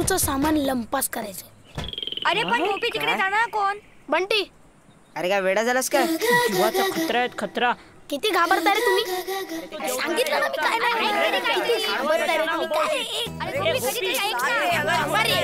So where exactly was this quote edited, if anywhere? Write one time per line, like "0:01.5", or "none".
none